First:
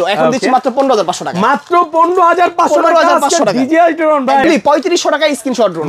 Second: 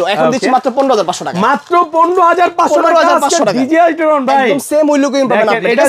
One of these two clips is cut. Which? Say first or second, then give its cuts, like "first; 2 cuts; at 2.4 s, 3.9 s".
first; 1 cut; at 4.4 s